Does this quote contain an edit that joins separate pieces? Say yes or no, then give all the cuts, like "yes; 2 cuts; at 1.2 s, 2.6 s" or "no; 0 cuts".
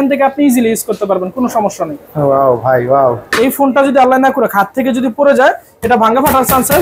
yes; 1 cut; at 3.3 s